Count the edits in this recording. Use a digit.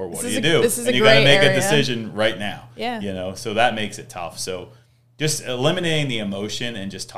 0